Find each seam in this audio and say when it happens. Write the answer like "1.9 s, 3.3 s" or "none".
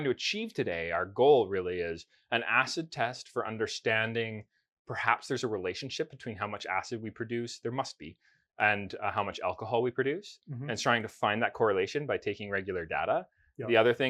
none